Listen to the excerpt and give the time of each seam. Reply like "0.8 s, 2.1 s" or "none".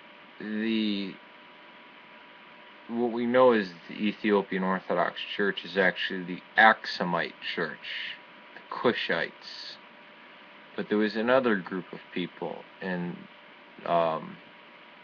6.1 s